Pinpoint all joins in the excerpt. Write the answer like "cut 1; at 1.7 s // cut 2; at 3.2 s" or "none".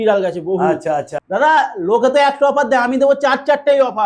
cut 1; at 0.9 s